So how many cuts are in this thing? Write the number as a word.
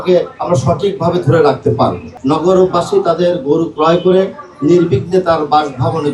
one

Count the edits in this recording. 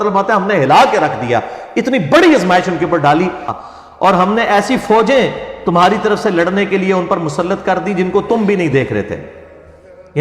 one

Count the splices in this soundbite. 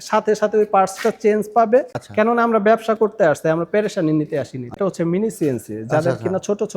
two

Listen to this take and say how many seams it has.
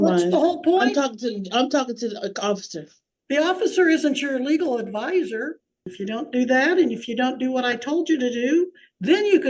one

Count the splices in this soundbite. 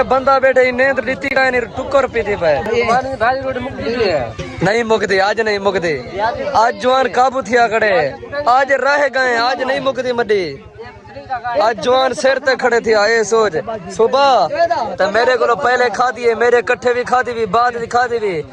zero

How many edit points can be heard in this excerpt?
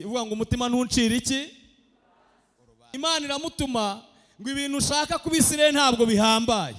one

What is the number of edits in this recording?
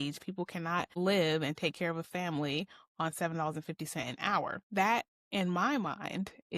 two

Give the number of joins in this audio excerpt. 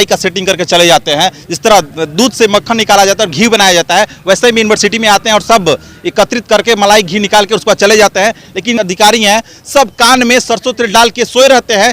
one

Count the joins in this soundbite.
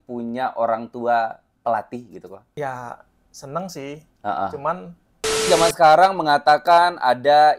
two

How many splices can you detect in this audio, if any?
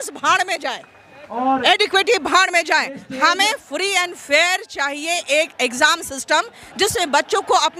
zero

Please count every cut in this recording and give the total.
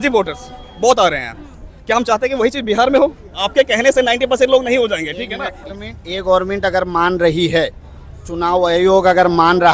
zero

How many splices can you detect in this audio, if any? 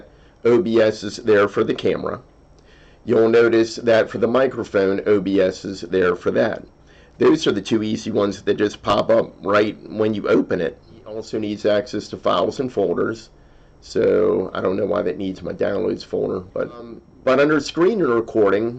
two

